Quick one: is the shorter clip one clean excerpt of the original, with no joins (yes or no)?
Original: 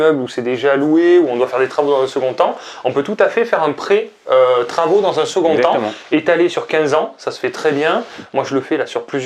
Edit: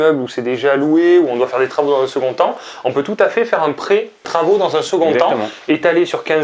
no